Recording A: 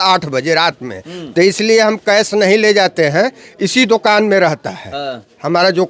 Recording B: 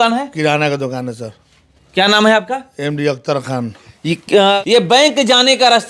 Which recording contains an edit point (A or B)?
B